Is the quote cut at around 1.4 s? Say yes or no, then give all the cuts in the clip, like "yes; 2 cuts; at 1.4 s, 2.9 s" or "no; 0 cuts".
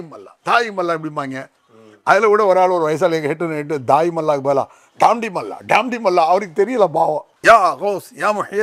no; 0 cuts